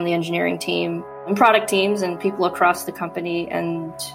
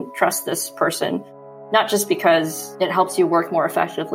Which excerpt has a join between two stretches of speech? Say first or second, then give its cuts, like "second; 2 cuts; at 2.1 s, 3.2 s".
first; 1 cut; at 1.2 s